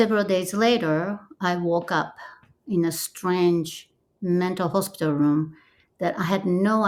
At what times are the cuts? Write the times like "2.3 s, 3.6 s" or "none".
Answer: none